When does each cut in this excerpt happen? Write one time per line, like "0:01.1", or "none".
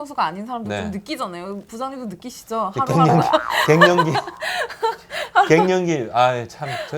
none